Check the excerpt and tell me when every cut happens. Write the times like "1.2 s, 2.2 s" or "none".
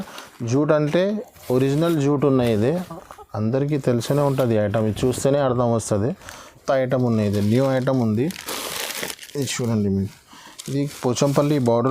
6.5 s